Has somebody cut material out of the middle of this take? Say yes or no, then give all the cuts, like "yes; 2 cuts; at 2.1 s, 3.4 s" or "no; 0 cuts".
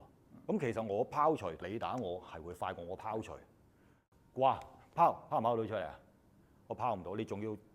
yes; 2 cuts; at 1.6 s, 3.9 s